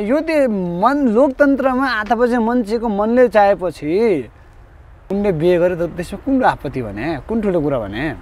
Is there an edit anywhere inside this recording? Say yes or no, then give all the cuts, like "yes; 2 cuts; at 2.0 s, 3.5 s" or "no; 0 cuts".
yes; 1 cut; at 5.0 s